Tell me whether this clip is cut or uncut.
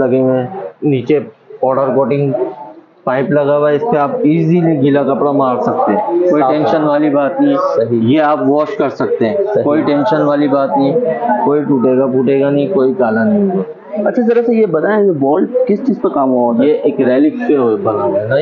uncut